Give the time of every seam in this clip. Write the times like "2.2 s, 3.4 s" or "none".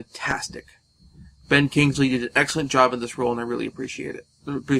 2.9 s